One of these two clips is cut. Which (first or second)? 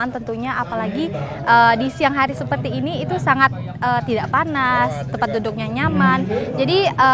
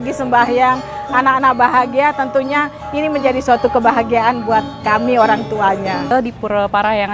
second